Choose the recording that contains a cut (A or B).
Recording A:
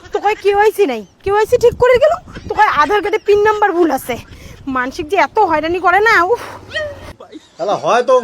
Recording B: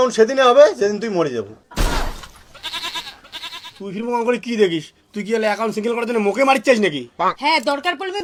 A